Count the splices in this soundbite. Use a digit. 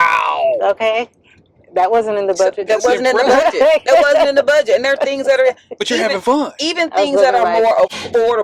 0